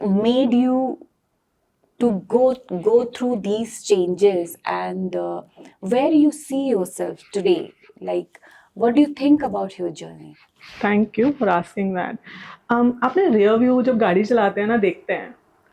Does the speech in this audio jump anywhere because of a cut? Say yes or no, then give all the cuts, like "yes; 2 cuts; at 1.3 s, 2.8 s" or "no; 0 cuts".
no; 0 cuts